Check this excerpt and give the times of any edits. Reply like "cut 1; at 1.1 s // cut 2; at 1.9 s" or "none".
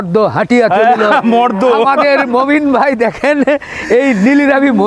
none